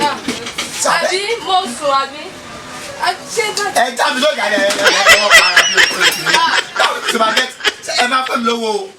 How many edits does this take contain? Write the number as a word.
zero